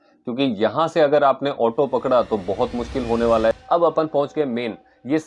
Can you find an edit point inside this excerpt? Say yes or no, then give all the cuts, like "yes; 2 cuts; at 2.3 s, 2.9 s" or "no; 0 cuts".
yes; 1 cut; at 3.5 s